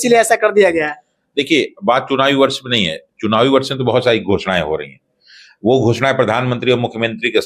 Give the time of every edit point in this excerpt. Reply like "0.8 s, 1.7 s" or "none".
none

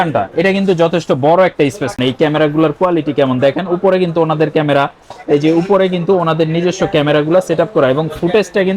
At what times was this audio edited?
2.0 s

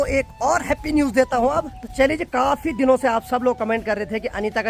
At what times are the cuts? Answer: none

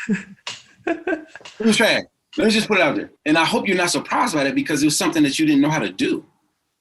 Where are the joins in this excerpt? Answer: 2.2 s, 3.1 s

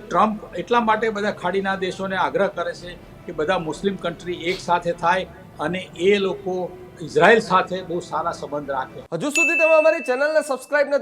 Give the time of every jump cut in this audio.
9.0 s

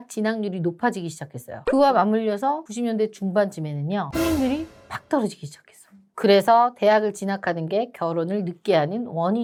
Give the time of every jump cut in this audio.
none

